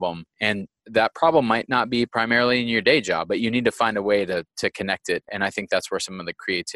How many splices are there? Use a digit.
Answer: 2